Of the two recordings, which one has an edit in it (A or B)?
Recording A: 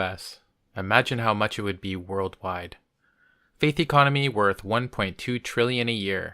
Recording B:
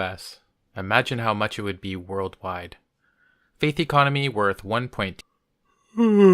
A